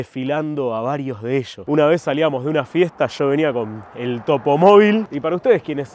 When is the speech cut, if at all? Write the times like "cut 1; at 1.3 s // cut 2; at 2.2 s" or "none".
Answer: cut 1; at 1.6 s // cut 2; at 5.1 s